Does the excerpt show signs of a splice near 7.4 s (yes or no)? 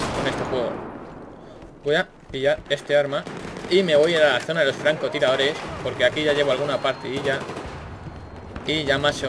yes